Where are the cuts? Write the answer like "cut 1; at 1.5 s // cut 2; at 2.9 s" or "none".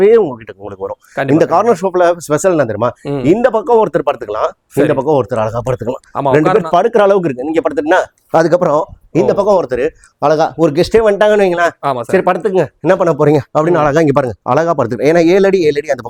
none